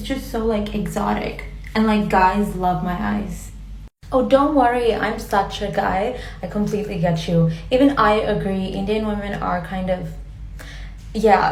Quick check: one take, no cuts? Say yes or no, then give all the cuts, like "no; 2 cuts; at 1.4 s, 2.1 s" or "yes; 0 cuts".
yes; 0 cuts